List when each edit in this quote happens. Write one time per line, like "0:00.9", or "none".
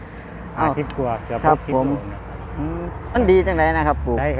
0:03.1

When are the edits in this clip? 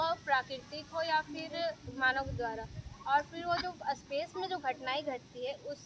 none

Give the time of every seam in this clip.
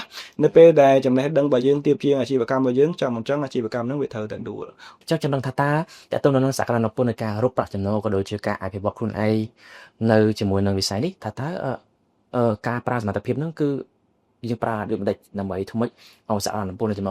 0:04.9

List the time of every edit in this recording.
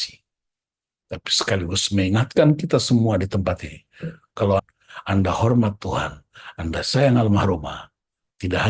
0:04.6

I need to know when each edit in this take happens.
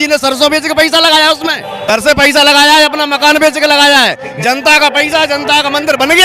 0:01.9

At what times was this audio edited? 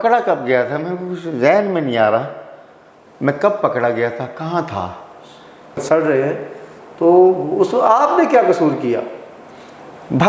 0:05.8

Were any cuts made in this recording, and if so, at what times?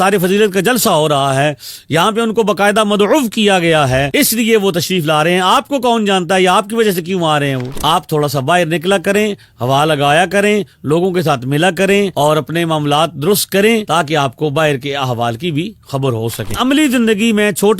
0:07.7
0:16.5

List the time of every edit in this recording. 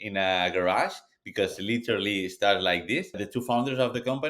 0:03.3

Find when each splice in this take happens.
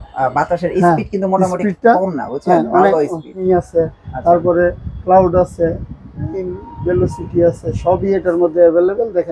0:03.4

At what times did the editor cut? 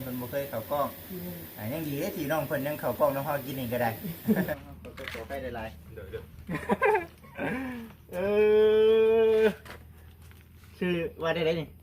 0:04.5

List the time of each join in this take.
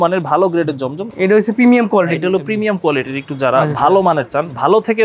0:01.1

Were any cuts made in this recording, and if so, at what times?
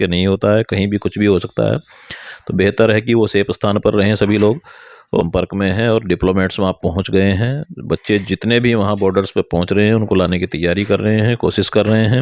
0:05.2

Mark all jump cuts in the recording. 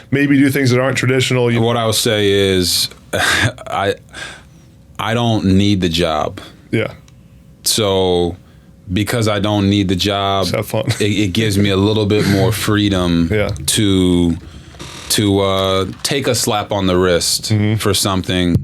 0:01.6

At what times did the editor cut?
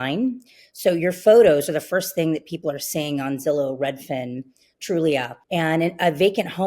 0:05.4

